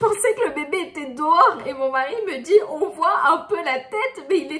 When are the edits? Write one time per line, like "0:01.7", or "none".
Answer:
none